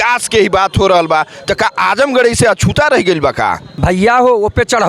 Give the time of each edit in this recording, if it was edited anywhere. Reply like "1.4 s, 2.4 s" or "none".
3.7 s